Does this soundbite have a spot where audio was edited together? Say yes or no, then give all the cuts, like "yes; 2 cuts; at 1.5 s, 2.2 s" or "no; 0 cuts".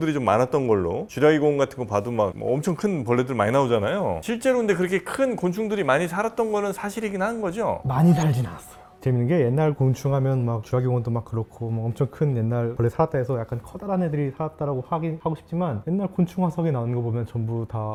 no; 0 cuts